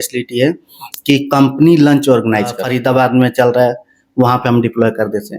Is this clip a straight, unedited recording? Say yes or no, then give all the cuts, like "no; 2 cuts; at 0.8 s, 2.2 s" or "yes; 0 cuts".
no; 1 cut; at 2.8 s